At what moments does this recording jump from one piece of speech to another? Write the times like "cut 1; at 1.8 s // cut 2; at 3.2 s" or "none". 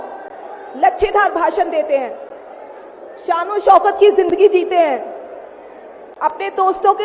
none